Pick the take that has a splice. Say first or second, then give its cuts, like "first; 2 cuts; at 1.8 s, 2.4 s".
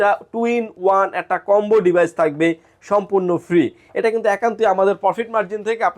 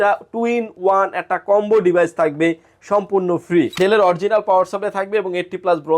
second; 1 cut; at 3.8 s